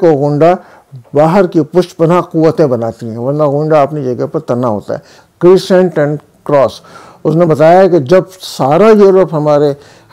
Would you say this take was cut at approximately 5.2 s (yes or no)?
yes